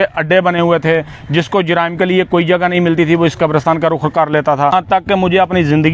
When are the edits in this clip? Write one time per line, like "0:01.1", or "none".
0:04.7